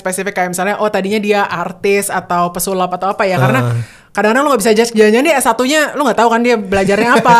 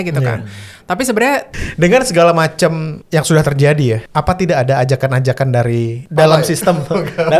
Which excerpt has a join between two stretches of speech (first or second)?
second